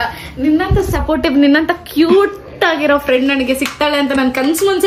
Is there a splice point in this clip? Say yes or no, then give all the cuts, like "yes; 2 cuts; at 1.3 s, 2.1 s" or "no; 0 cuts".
no; 0 cuts